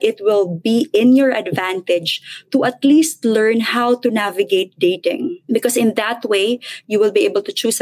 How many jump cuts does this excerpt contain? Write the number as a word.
one